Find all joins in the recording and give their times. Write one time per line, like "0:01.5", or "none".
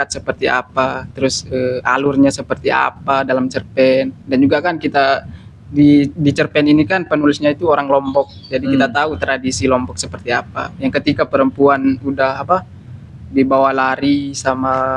none